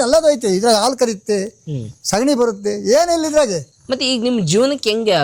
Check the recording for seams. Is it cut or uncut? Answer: uncut